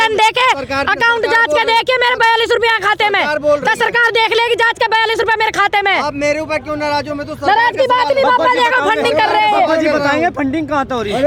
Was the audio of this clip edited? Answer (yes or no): no